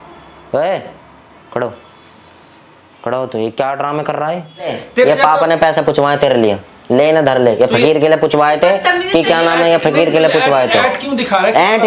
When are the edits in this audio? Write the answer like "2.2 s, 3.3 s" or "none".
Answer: 4.7 s